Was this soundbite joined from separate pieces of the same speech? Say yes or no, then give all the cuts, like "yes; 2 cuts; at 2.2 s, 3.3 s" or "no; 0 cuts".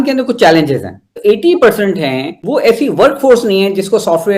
yes; 1 cut; at 1.2 s